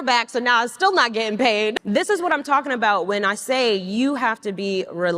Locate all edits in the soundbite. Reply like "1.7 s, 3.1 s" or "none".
1.7 s